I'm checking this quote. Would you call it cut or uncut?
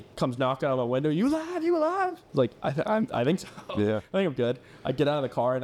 uncut